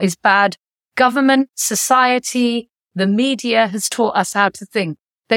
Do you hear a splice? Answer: no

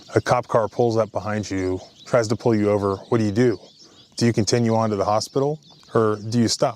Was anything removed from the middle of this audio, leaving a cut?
yes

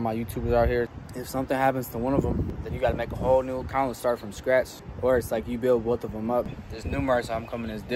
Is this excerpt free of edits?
no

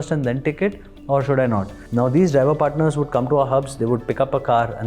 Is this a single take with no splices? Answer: no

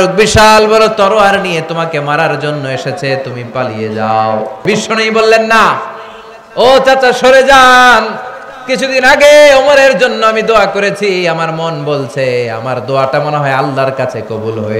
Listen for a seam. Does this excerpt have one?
yes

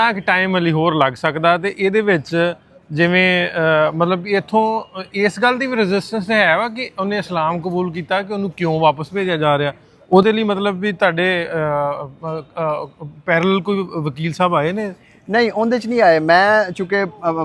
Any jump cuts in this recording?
no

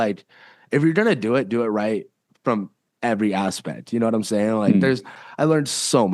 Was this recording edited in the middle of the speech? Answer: yes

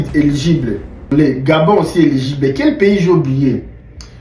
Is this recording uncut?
no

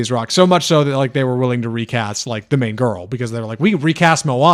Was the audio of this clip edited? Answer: no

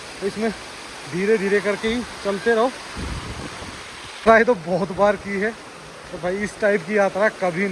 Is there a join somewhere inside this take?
no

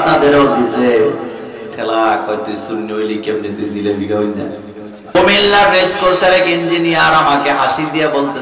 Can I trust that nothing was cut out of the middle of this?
no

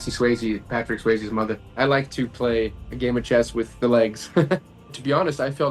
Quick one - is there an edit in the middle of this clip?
yes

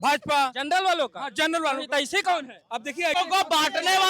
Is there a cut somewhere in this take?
yes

